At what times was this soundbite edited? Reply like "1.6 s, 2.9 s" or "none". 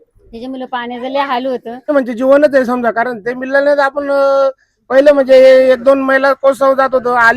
1.9 s